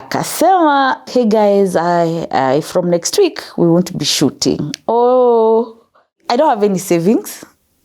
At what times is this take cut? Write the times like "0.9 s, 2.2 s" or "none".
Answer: 1.1 s, 6.2 s